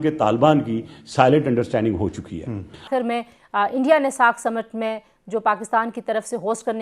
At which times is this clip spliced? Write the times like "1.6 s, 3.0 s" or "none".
2.9 s